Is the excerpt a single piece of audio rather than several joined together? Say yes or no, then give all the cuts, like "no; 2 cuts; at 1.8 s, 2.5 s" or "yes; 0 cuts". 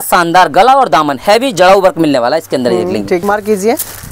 no; 1 cut; at 3.2 s